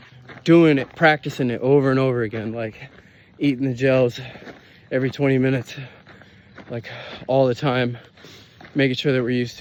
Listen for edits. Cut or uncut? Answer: uncut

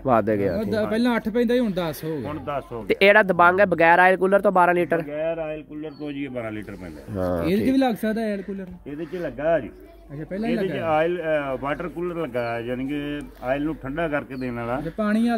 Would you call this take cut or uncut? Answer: uncut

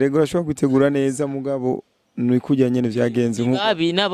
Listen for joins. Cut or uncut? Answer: uncut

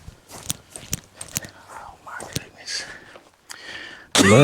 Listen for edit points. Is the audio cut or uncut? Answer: uncut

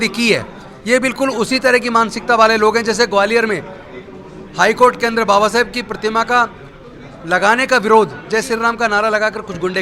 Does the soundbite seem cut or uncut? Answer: uncut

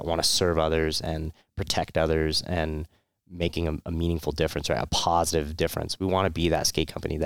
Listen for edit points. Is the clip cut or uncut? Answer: uncut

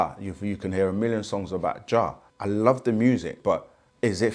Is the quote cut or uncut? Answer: cut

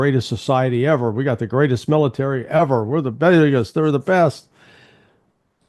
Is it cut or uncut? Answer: uncut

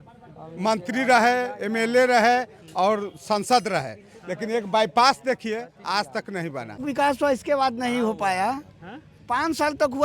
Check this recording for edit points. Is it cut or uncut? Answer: cut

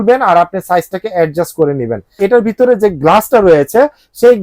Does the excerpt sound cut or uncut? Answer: cut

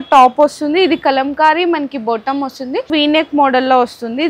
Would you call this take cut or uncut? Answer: cut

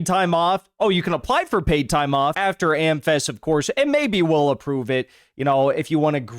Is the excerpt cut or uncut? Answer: cut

